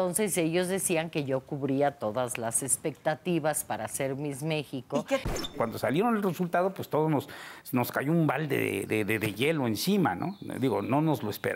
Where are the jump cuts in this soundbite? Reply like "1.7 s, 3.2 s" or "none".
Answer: 5.3 s